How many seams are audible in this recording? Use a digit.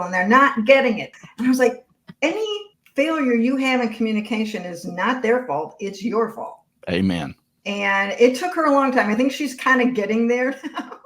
1